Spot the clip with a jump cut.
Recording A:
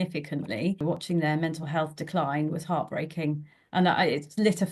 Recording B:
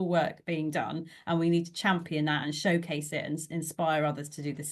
A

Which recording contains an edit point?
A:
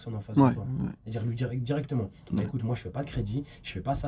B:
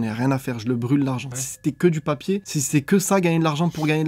B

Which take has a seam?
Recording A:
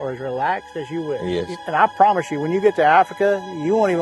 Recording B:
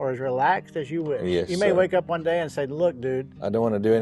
A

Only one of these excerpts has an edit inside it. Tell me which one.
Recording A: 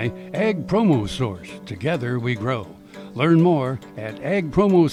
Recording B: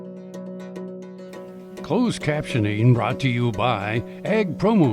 B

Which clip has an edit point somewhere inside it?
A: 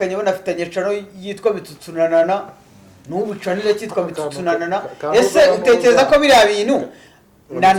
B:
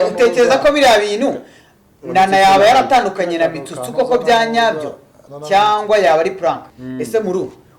B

